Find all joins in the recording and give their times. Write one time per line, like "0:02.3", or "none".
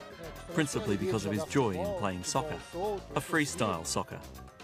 none

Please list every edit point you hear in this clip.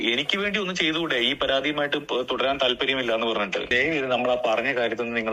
0:03.7

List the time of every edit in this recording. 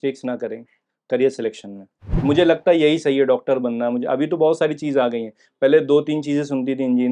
0:02.1

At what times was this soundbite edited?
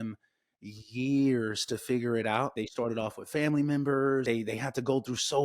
0:02.6
0:04.2

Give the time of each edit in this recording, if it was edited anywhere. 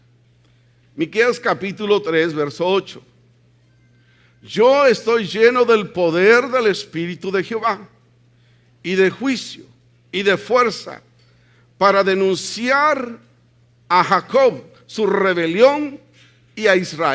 0:13.2

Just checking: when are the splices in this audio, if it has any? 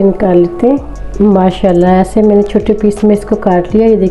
0:01.0

